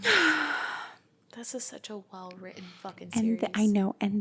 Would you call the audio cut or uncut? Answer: uncut